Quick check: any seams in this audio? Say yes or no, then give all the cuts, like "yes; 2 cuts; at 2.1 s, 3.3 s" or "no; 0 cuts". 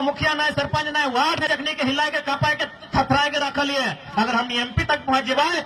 yes; 1 cut; at 1.4 s